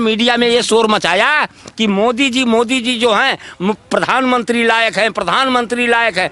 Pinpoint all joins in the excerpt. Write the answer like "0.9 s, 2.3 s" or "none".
none